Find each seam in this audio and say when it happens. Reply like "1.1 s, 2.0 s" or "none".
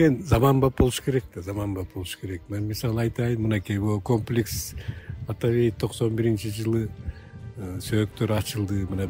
none